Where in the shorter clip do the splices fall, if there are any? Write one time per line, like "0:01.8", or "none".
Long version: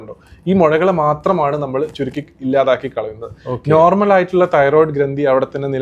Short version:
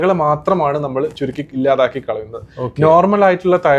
0:01.5